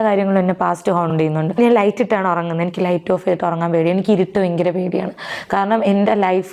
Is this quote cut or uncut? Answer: cut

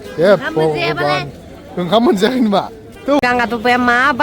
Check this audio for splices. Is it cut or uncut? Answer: cut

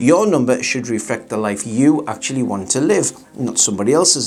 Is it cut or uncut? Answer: uncut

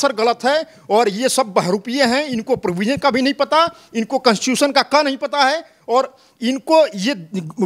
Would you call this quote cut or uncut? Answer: uncut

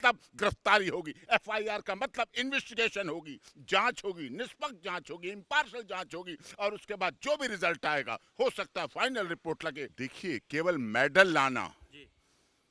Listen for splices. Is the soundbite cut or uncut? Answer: cut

